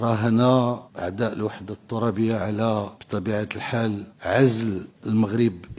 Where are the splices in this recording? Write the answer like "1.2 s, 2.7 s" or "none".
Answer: 0.9 s, 3.0 s, 4.1 s, 4.9 s